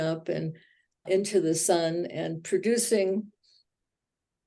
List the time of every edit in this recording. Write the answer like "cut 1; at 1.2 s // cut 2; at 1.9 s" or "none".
cut 1; at 1.0 s